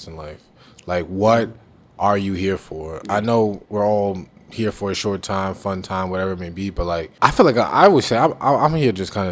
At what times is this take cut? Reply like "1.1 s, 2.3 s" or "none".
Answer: 7.1 s